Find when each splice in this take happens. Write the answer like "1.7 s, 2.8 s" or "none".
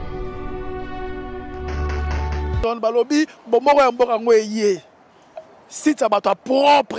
none